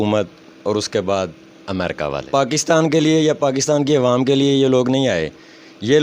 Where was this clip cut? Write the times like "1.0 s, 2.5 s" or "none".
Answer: 2.1 s